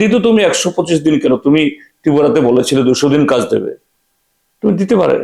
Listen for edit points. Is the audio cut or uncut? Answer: uncut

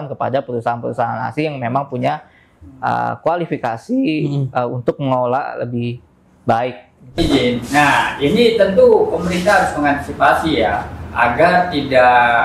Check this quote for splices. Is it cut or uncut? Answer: cut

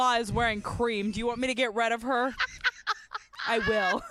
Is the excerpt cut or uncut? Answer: uncut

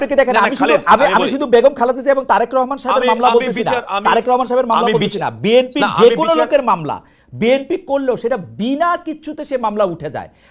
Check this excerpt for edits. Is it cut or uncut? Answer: uncut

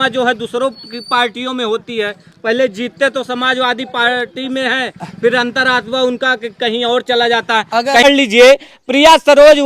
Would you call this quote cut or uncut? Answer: cut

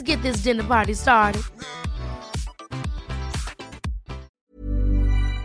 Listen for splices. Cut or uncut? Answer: cut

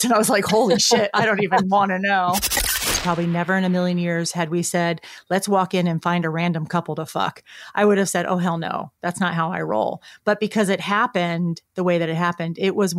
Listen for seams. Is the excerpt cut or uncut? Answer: cut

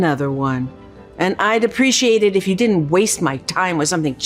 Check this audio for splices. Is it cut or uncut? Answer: uncut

